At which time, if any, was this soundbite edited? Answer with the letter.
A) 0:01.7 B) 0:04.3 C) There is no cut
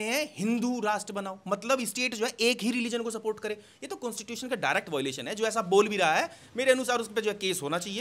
C